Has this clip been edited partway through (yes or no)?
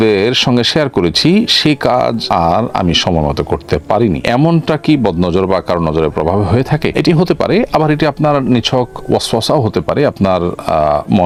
no